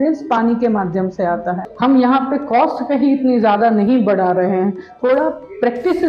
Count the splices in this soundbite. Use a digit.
1